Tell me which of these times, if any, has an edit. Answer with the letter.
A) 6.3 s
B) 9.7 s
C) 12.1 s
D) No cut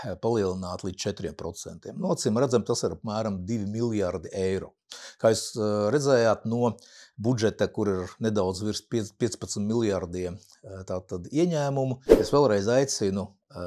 C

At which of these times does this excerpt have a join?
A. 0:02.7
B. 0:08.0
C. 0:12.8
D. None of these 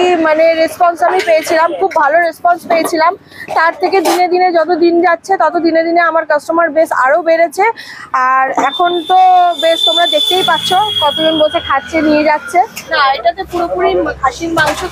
C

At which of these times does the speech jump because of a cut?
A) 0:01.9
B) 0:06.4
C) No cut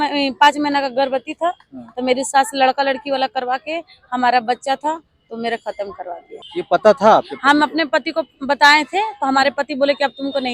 C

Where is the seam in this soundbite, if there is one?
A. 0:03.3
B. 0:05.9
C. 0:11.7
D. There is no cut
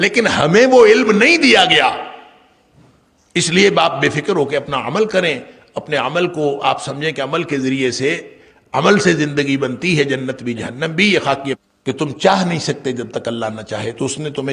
C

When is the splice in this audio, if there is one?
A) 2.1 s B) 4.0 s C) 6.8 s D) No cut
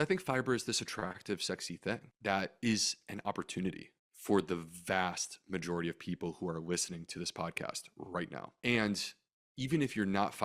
A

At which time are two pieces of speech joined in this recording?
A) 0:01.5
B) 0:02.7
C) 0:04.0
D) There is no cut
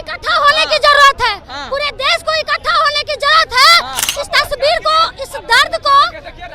C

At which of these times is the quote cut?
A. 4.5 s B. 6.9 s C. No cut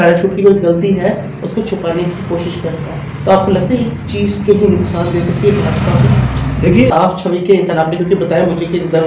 B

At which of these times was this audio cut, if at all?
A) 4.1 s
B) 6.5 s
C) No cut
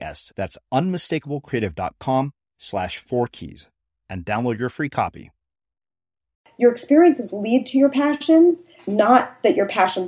B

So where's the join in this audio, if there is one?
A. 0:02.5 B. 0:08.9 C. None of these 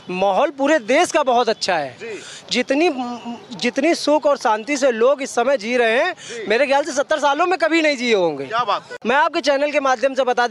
B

